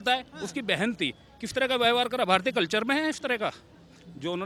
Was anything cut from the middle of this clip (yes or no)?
no